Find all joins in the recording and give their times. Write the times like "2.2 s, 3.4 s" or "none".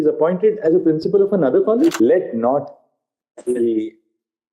1.9 s